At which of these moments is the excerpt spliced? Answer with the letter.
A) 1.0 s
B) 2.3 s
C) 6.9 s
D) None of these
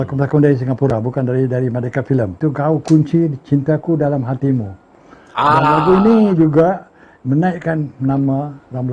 B